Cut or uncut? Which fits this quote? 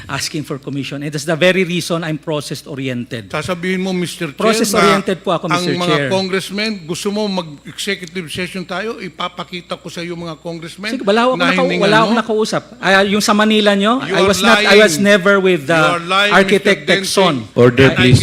uncut